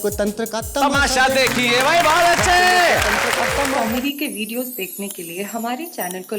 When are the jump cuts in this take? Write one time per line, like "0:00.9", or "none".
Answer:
0:03.8